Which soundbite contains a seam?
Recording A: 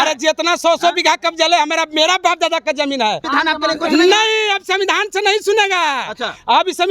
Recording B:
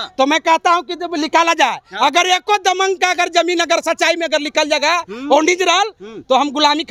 A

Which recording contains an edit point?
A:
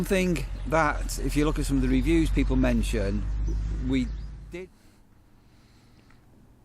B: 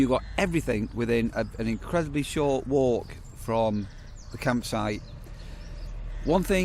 A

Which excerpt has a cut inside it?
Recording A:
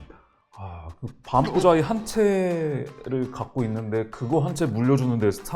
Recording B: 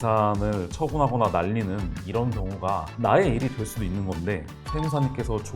B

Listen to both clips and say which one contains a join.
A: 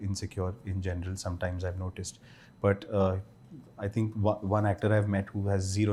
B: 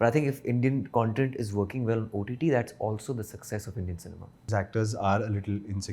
B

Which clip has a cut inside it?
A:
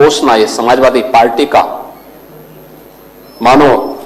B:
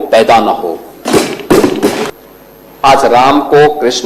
B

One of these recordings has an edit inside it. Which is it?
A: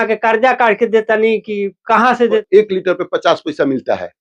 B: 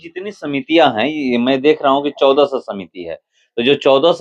A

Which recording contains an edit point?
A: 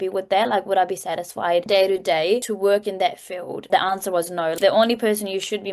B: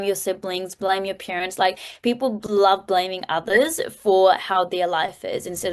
A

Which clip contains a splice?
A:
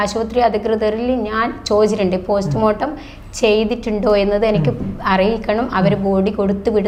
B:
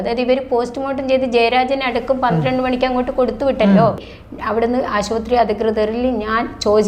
B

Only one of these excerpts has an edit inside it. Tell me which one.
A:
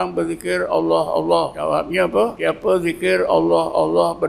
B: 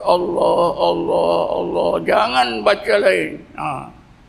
A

